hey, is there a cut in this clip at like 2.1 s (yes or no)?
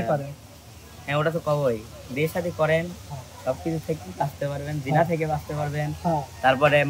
no